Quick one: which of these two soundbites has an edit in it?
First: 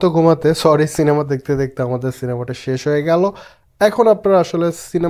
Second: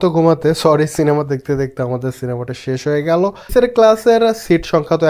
second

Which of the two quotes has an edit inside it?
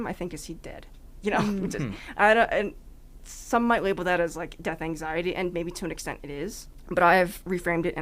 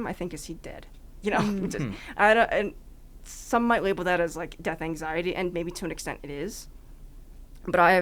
first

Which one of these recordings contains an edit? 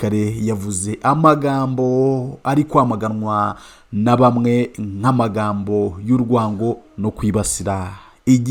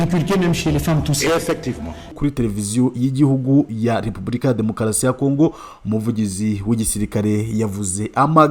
second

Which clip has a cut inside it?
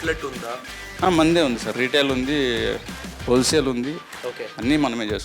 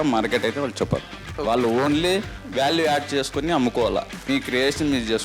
second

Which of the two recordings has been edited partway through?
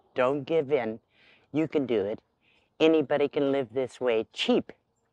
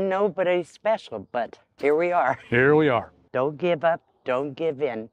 second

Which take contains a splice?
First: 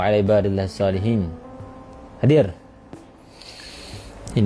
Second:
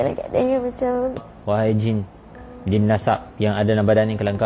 second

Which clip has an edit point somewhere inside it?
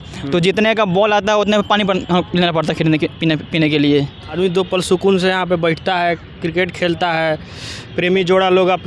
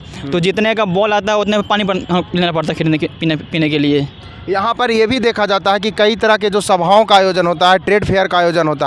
first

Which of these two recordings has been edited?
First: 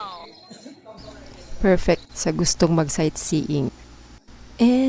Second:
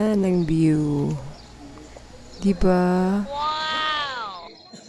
first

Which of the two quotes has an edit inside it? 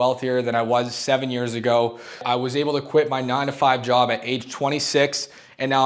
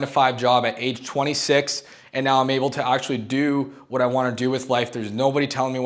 first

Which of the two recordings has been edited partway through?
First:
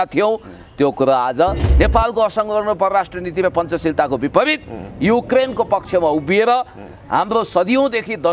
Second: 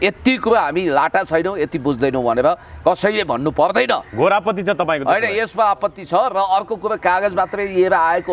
first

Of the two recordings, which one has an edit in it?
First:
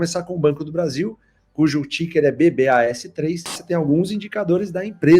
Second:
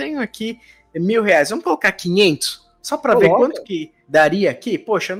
first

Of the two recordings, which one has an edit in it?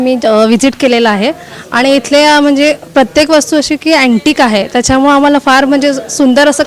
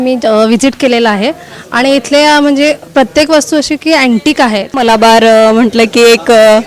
second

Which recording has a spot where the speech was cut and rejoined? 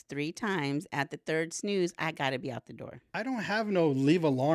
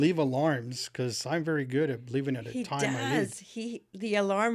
first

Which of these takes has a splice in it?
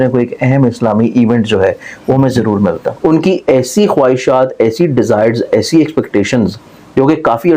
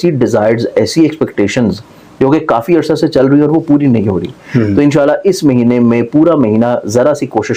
first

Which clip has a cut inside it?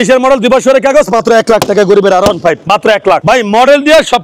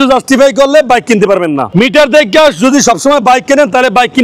first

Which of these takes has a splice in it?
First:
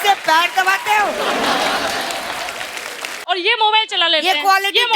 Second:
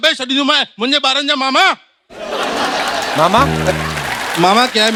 first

